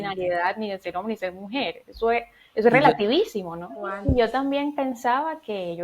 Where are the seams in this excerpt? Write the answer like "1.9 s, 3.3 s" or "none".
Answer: 4.0 s